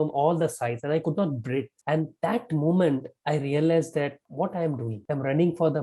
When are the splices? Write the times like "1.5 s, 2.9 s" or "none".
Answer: 1.7 s, 4.2 s, 5.0 s

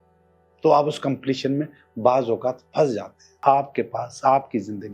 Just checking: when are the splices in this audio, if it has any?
3.4 s

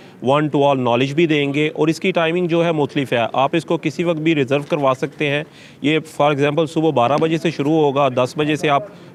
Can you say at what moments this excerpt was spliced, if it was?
none

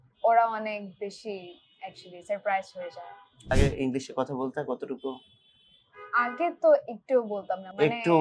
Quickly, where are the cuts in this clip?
3.5 s

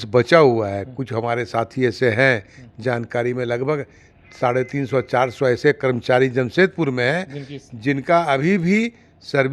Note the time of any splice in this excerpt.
none

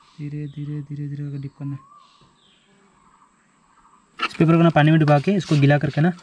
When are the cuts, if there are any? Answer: 4.2 s

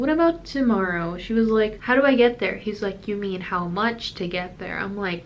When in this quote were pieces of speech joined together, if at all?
1.8 s

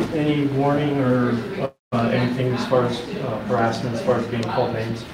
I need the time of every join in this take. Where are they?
none

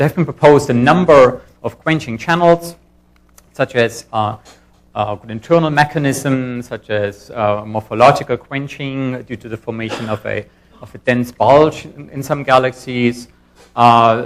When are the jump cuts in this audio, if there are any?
11.3 s

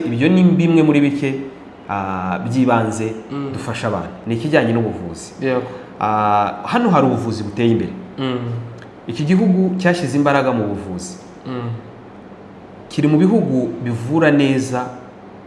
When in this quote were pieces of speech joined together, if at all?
4.1 s

